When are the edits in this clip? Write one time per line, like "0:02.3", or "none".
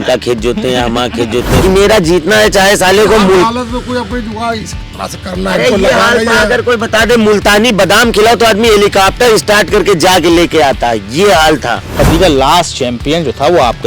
0:01.6
0:11.8

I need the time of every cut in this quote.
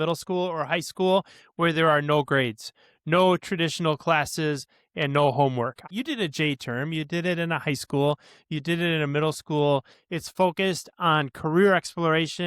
0:05.8
0:10.0

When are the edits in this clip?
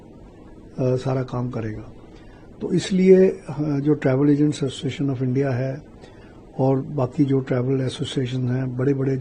none

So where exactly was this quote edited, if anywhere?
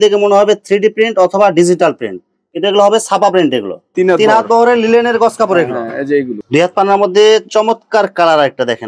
0:03.8
0:06.3

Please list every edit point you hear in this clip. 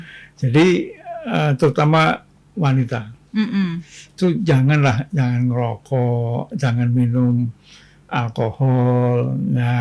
none

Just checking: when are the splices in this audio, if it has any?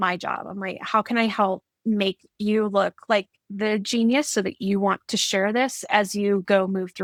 none

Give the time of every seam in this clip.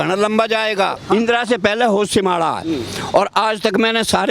0:01.0

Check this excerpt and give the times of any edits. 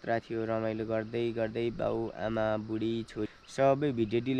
0:03.2

